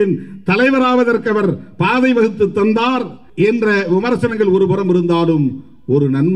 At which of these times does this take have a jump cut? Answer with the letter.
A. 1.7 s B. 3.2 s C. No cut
B